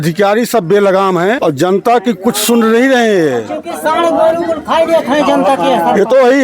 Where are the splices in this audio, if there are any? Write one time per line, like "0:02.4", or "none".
0:01.4